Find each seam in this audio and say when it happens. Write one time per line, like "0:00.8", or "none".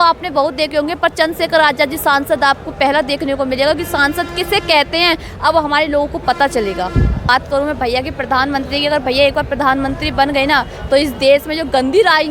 0:07.3